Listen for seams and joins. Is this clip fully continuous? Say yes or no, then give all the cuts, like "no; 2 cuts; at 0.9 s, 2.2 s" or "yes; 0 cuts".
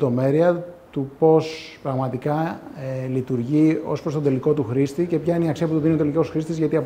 yes; 0 cuts